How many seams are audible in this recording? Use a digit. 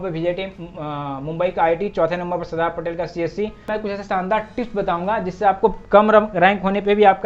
1